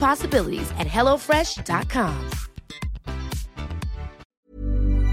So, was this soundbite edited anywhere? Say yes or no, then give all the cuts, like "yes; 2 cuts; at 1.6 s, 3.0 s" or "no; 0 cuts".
yes; 1 cut; at 4.2 s